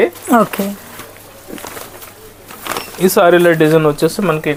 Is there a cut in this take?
no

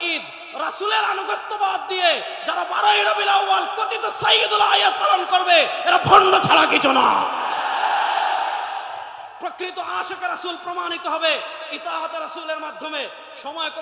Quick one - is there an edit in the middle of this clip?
no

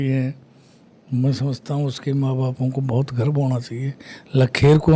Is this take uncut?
yes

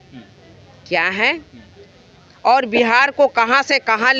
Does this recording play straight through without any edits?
yes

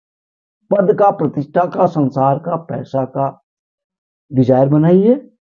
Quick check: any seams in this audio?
no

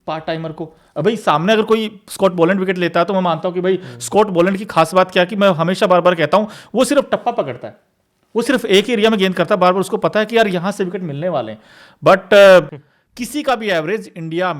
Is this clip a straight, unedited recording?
no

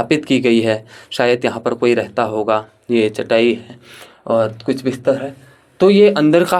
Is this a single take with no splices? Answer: yes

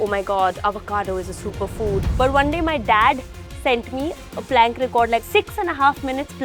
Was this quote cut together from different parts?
yes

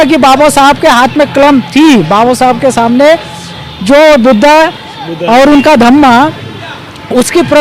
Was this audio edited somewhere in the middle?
no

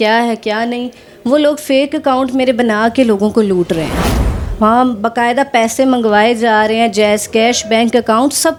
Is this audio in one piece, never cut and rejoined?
yes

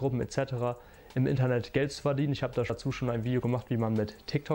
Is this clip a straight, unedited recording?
no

